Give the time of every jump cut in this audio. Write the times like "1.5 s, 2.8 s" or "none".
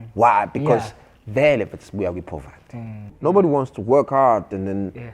3.1 s